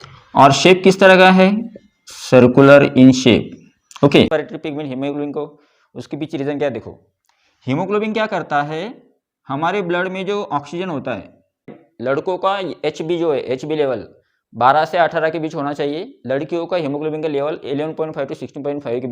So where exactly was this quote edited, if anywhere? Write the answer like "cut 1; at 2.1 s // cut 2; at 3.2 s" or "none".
cut 1; at 4.3 s // cut 2; at 11.8 s